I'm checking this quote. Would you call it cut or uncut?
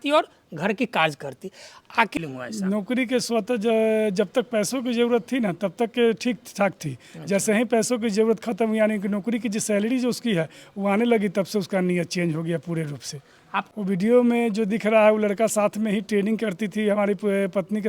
cut